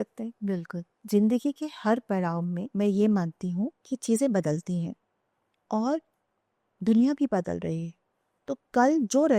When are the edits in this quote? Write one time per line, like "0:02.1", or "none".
0:01.0